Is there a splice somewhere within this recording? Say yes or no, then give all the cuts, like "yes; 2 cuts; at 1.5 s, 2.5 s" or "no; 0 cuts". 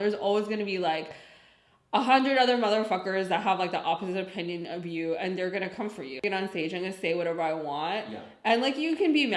yes; 1 cut; at 6.2 s